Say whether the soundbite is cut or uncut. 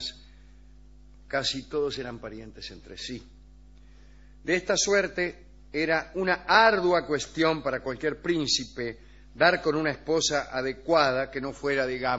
cut